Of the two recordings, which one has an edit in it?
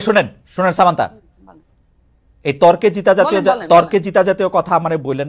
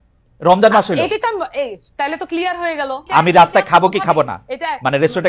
second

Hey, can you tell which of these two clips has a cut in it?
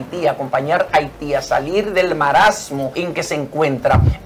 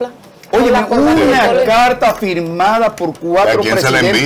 first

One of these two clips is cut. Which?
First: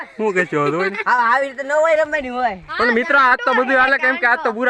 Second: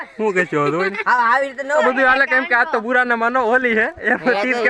second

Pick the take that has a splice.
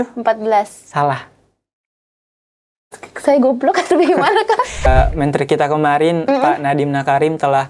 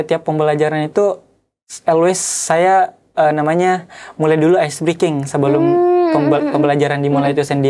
first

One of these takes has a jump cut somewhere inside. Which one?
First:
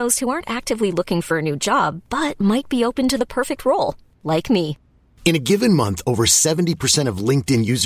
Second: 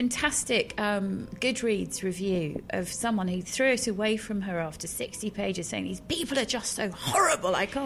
second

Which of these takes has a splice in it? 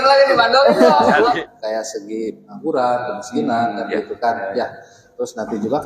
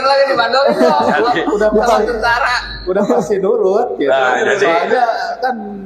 first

